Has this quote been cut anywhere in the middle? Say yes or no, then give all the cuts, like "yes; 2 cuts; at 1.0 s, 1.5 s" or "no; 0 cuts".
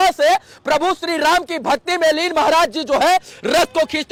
no; 0 cuts